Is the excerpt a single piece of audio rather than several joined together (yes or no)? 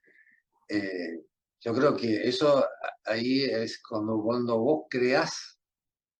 yes